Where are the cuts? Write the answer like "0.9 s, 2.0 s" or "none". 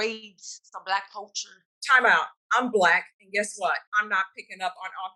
1.7 s, 3.9 s